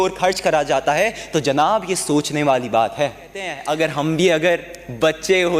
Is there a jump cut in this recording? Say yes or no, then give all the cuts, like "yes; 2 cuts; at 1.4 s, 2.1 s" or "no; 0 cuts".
yes; 1 cut; at 3.6 s